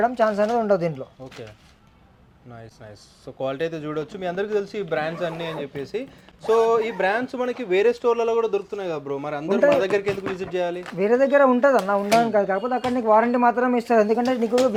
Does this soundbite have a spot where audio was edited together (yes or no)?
no